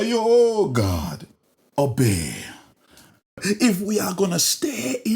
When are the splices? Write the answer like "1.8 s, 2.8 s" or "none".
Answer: 3.4 s